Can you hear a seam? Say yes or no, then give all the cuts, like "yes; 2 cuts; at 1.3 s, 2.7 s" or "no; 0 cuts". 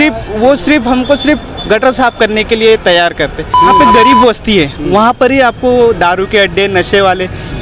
yes; 1 cut; at 3.7 s